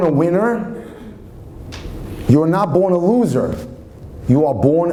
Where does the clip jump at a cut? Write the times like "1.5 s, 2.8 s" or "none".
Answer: none